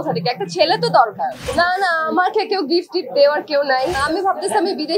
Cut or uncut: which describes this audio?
cut